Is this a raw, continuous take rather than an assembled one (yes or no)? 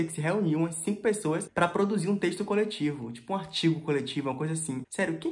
yes